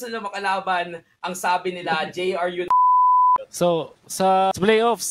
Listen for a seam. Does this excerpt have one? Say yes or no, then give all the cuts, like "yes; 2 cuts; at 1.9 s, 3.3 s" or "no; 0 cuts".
no; 0 cuts